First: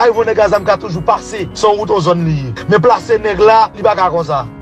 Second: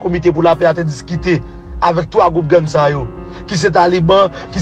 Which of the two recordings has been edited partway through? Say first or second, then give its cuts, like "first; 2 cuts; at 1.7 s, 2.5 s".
first; 3 cuts; at 1.4 s, 2.5 s, 3.7 s